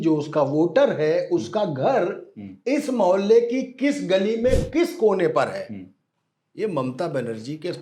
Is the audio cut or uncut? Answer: uncut